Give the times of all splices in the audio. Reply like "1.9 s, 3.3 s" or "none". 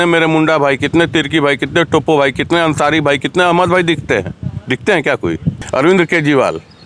5.5 s